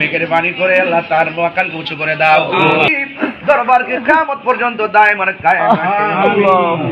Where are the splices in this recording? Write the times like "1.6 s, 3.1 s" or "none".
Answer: 2.9 s

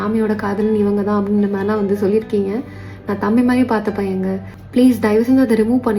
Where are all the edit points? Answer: 4.5 s

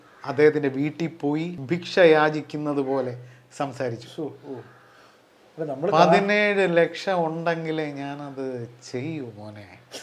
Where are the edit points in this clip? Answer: 1.6 s

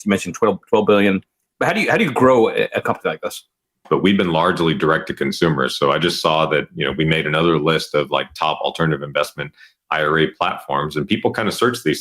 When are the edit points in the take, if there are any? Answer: 3.8 s

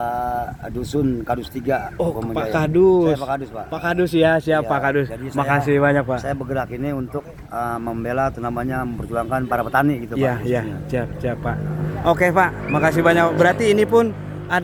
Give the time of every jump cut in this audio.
none

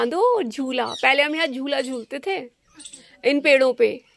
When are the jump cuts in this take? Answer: none

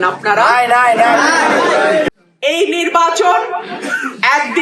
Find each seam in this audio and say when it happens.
2.1 s

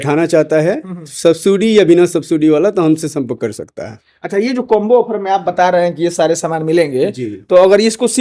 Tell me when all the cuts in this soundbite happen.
none

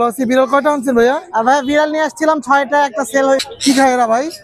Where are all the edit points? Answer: 3.5 s

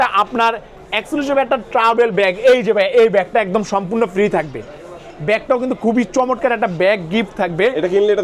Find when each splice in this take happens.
none

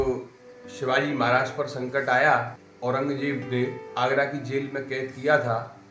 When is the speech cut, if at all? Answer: 2.6 s, 3.6 s

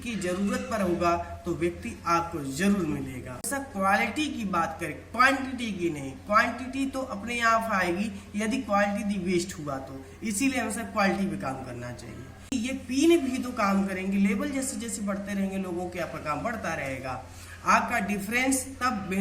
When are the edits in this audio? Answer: 3.5 s, 12.5 s

